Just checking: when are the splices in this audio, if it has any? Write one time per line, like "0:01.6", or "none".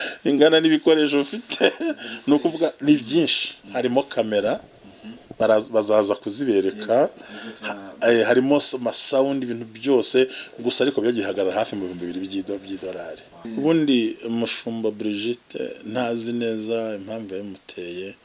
0:13.5